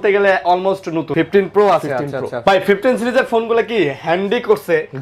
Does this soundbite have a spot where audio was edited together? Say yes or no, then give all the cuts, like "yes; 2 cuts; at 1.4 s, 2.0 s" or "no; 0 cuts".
yes; 2 cuts; at 1.1 s, 2.3 s